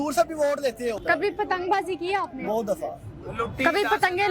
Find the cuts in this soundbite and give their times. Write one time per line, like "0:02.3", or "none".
0:01.0

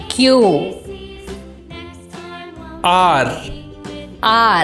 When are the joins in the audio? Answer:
none

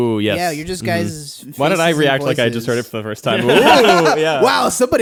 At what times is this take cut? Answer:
none

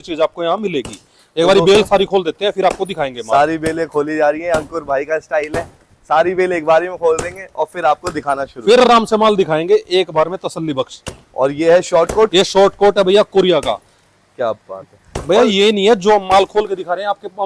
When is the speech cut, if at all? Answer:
none

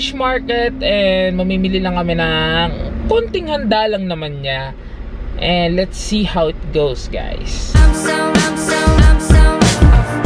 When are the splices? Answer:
none

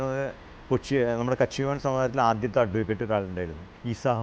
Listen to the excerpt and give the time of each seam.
none

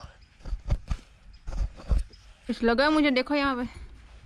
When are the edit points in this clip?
0:02.5

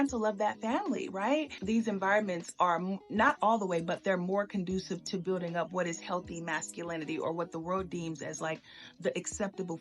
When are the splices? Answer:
0:01.7

